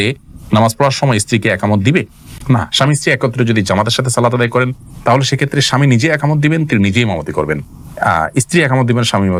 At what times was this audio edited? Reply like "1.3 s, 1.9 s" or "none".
none